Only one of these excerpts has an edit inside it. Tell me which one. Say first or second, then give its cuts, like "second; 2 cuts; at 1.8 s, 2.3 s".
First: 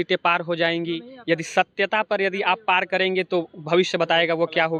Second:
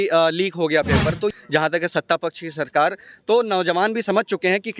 second; 1 cut; at 1.3 s